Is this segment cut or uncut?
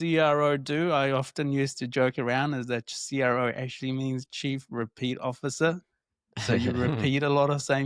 uncut